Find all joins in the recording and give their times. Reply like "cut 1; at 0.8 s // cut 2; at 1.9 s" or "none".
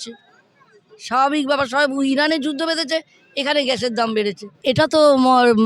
cut 1; at 4.6 s